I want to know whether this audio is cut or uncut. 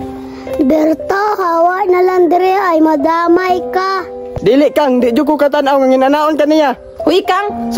uncut